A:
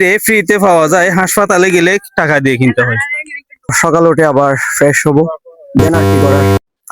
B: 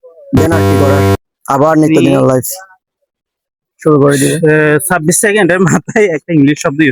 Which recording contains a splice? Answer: A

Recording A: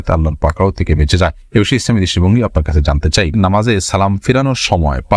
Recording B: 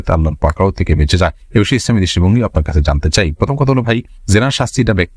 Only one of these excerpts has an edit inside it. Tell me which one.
A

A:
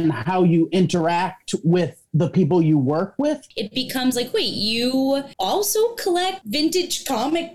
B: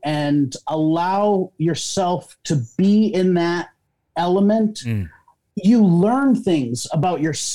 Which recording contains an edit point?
A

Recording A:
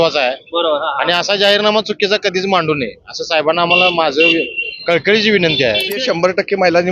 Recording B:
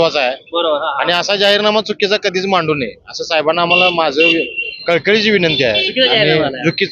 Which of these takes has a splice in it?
A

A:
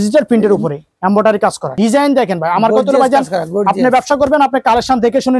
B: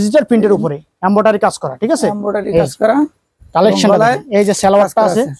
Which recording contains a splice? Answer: A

